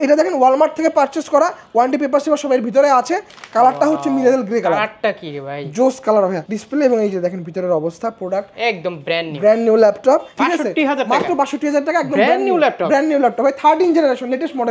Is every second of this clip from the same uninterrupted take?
no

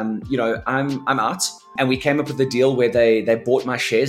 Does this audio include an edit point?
yes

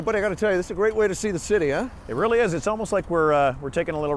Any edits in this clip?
no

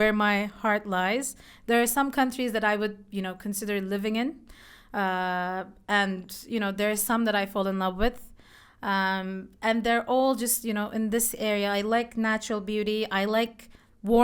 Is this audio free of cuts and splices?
yes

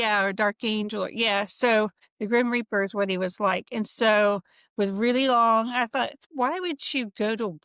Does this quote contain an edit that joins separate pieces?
yes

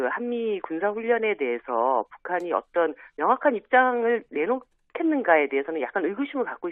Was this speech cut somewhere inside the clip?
no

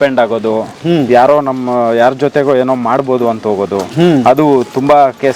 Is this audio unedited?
yes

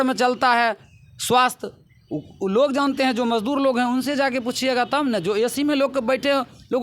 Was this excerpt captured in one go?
yes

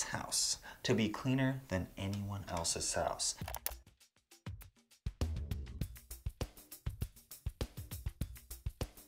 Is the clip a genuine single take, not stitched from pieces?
yes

